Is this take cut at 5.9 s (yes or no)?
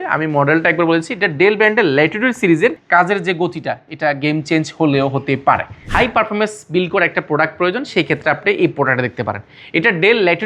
yes